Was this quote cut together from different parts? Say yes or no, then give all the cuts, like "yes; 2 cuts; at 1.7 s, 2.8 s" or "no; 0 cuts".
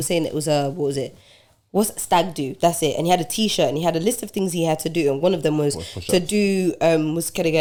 no; 0 cuts